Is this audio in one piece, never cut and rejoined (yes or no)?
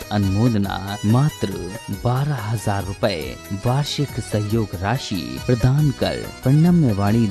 yes